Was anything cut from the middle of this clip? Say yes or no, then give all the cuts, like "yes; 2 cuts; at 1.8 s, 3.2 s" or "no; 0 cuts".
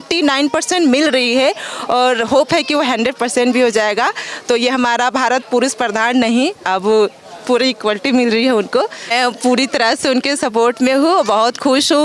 yes; 1 cut; at 9.1 s